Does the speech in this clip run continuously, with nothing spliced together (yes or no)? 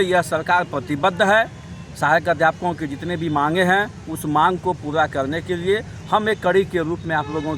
yes